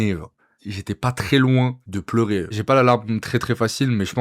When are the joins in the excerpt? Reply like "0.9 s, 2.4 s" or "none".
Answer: 2.5 s